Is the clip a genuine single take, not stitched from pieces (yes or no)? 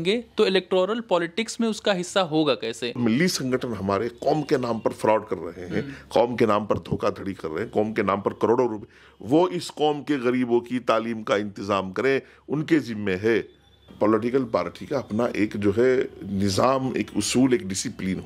no